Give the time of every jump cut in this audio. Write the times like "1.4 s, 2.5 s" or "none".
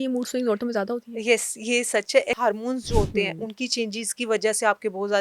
2.4 s